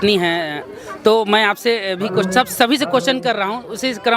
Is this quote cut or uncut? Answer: uncut